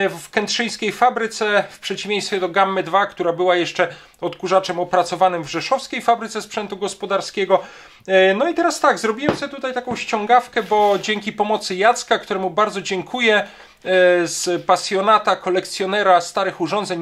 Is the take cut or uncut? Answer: uncut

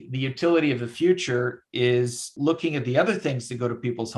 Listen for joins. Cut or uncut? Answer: cut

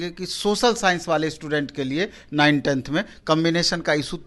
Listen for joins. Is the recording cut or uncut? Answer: uncut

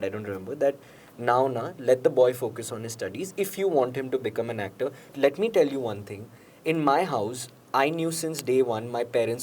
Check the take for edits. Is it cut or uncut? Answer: cut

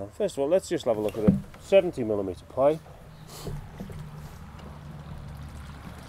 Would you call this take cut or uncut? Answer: uncut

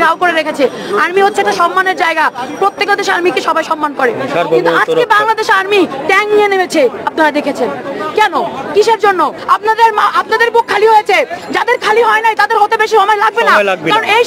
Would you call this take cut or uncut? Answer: cut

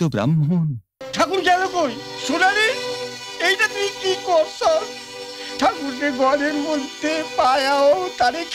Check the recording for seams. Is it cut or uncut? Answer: cut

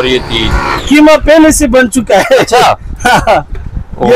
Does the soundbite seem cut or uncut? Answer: uncut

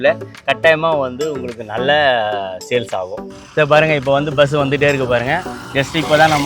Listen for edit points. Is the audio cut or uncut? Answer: cut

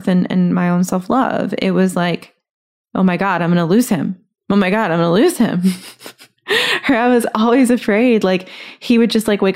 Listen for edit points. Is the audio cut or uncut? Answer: uncut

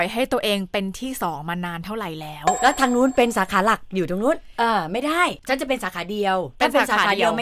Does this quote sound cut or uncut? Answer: cut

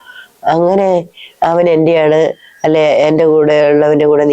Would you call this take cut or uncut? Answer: uncut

